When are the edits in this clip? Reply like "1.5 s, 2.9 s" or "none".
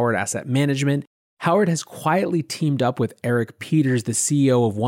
1.2 s